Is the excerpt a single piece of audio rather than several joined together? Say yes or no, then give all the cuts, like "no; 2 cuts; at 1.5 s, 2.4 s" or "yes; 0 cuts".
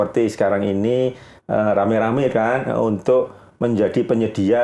yes; 0 cuts